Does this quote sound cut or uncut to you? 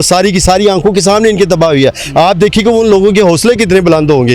uncut